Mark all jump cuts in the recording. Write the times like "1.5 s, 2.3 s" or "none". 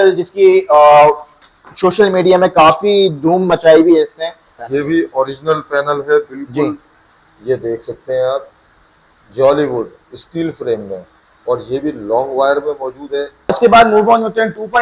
4.6 s, 13.6 s